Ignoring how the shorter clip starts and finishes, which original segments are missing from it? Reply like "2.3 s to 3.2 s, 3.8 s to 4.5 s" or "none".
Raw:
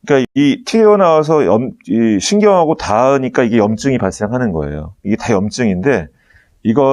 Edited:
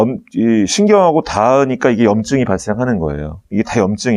none